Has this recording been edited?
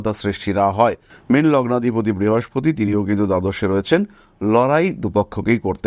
yes; 1 cut; at 1.1 s

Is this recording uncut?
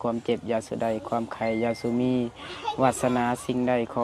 yes; 0 cuts

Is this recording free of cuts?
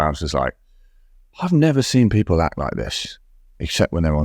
yes; 0 cuts

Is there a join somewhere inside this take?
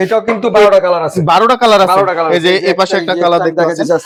no; 0 cuts

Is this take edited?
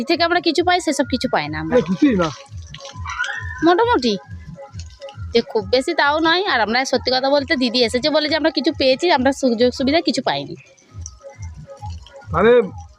no; 0 cuts

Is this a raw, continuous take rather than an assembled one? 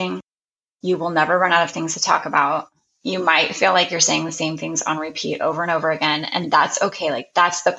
yes; 0 cuts

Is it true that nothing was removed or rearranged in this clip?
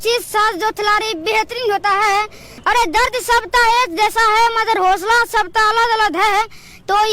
no; 1 cut; at 2.5 s

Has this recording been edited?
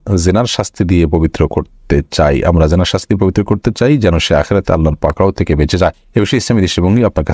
yes; 1 cut; at 6.0 s

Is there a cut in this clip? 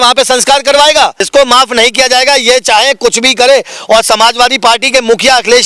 yes; 1 cut; at 1.3 s

